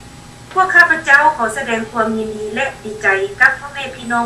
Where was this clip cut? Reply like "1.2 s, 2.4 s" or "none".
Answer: 3.2 s